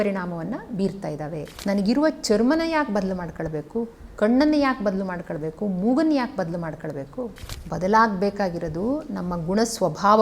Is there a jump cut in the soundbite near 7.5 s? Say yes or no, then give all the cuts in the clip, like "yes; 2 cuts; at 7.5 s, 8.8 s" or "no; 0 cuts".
yes; 2 cuts; at 1.4 s, 7.5 s